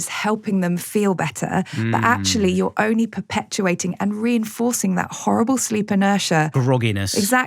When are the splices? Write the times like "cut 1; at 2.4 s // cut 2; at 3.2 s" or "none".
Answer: cut 1; at 6.6 s